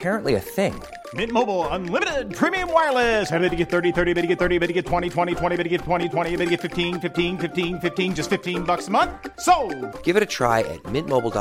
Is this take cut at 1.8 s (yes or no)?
no